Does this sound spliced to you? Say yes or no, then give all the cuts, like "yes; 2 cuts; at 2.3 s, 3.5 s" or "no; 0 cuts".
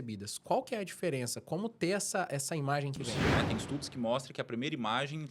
yes; 1 cut; at 3.2 s